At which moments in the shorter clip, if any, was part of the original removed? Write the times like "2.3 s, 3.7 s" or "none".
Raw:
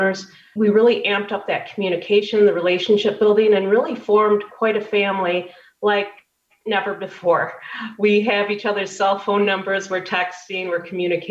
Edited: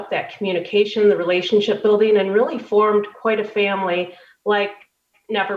none